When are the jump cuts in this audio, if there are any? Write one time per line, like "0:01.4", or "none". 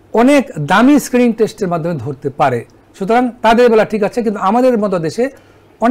none